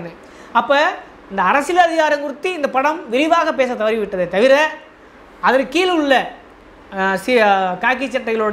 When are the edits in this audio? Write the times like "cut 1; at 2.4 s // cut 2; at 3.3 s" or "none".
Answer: none